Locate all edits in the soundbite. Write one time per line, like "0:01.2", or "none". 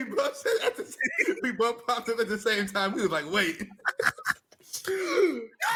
none